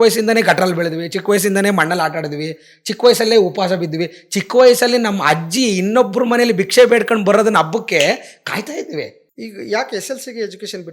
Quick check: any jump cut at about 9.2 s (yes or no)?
yes